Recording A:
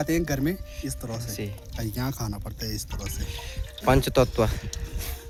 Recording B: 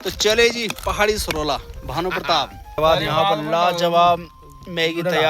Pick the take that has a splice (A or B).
B